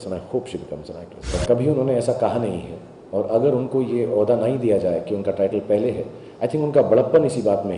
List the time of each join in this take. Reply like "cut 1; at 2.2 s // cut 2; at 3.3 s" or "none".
cut 1; at 1.3 s